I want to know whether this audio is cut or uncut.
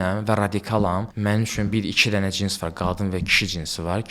cut